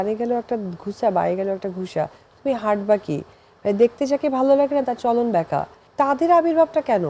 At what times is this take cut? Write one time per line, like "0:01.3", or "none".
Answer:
0:05.8